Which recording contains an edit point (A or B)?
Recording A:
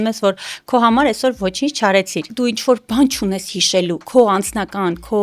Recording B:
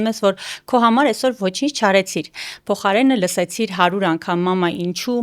A